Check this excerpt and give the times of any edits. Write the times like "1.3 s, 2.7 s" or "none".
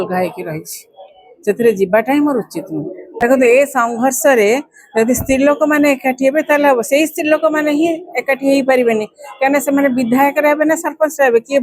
3.1 s

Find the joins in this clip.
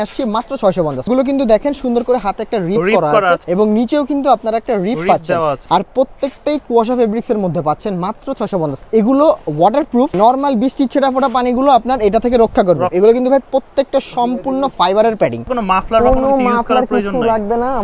1.1 s, 3.4 s, 5.6 s, 8.8 s, 10.1 s, 12.9 s, 15.5 s

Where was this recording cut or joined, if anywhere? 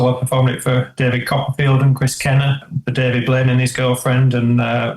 2.8 s

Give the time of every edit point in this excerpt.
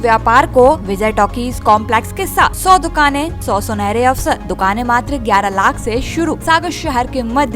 0.9 s, 2.6 s, 3.4 s, 4.5 s, 6.4 s

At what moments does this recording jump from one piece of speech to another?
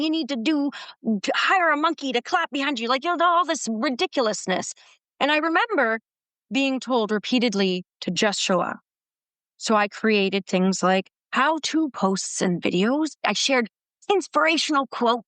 13.2 s

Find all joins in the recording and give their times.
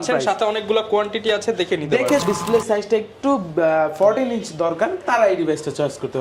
2.2 s

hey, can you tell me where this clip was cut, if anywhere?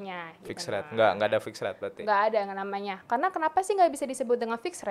none

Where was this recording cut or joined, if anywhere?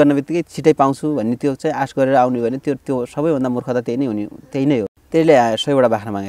5.0 s

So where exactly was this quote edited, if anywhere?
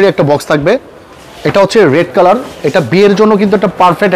none

